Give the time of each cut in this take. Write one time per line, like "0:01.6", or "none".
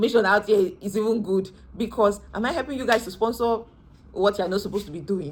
none